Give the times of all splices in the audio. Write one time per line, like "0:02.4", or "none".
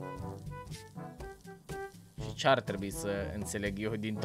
none